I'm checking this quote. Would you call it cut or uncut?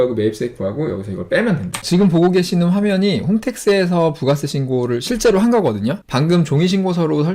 cut